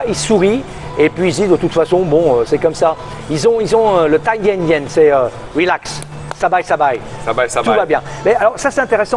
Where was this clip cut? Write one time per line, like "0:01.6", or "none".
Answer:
none